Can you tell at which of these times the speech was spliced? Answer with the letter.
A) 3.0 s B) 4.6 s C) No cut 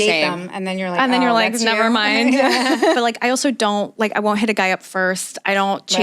A